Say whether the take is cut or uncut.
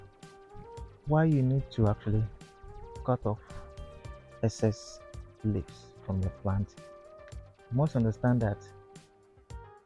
uncut